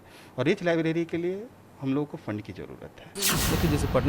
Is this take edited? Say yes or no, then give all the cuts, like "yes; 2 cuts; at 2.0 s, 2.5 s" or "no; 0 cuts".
yes; 1 cut; at 3.1 s